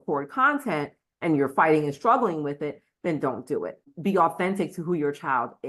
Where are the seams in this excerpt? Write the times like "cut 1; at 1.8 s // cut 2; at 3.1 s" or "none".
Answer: cut 1; at 3.9 s